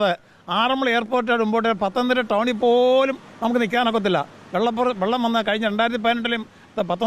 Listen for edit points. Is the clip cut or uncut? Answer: uncut